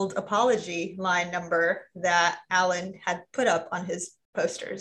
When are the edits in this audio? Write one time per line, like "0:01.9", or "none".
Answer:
none